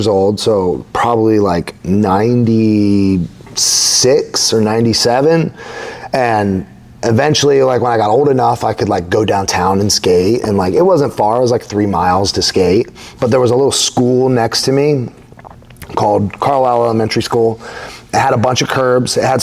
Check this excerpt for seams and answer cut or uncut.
uncut